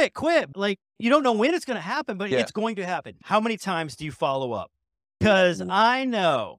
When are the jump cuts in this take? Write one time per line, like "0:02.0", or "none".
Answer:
0:03.1
0:05.2